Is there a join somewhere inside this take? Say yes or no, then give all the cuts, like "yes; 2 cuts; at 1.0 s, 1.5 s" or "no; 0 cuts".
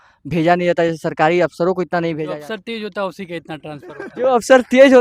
yes; 1 cut; at 2.3 s